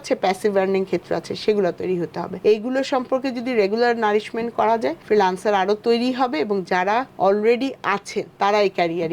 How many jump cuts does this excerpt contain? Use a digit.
4